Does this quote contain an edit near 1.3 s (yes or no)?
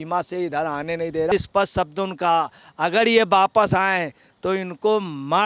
yes